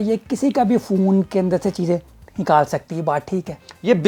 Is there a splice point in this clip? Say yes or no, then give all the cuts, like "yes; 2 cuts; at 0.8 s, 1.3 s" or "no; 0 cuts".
no; 0 cuts